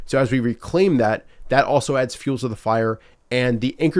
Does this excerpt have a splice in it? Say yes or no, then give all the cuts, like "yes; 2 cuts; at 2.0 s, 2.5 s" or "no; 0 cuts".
no; 0 cuts